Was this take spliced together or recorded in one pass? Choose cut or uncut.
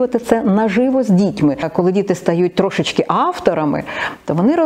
cut